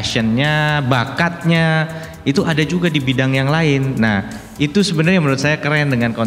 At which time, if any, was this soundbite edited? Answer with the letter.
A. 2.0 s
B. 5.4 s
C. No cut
C